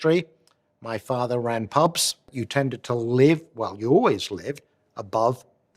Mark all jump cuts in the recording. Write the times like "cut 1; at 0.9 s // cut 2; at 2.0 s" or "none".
cut 1; at 2.4 s